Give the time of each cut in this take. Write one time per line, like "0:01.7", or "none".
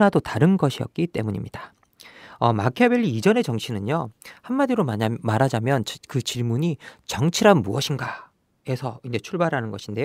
0:07.1